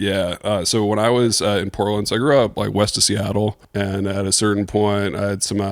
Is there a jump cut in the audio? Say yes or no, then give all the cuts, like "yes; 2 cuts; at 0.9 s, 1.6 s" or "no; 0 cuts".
yes; 1 cut; at 3.6 s